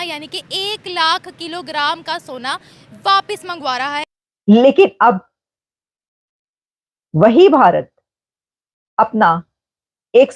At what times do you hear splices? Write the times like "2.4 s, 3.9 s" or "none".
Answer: 4.1 s